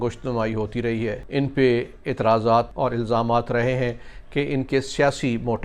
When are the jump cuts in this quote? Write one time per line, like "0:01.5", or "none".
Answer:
0:01.2
0:02.7